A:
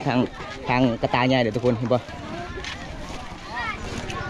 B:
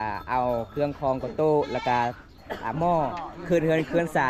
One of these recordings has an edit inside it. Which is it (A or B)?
A